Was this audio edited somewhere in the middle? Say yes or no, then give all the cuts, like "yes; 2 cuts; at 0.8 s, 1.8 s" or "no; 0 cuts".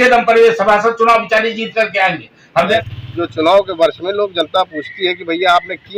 yes; 1 cut; at 2.8 s